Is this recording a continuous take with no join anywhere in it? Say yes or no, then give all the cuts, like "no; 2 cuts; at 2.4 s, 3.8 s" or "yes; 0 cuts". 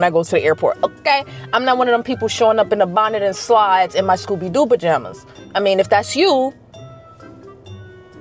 yes; 0 cuts